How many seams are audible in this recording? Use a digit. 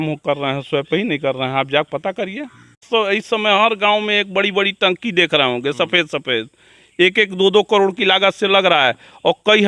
1